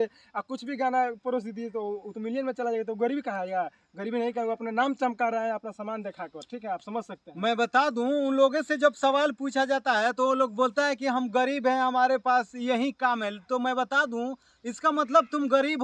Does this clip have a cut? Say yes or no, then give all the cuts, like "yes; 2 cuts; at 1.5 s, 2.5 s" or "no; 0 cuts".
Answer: no; 0 cuts